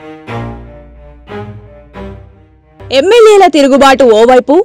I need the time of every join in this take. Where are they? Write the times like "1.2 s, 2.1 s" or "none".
1.5 s, 2.2 s